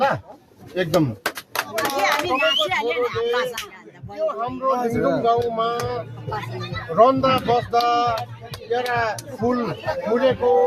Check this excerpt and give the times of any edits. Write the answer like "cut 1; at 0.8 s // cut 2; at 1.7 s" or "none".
cut 1; at 1.9 s